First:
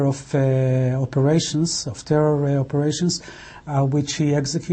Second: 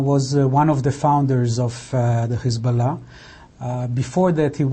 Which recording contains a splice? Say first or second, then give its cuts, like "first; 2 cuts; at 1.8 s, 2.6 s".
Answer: second; 1 cut; at 2.6 s